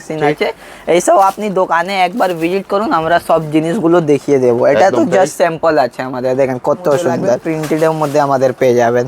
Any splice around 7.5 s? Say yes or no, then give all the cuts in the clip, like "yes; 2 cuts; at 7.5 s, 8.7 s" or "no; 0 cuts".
yes; 1 cut; at 7.5 s